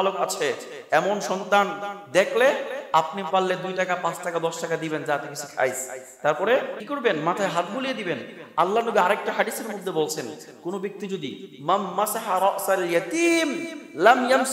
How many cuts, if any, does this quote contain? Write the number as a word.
one